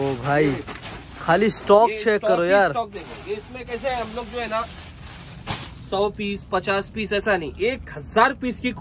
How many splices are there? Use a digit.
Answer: 0